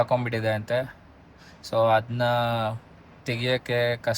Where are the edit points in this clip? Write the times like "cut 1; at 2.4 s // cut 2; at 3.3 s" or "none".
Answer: none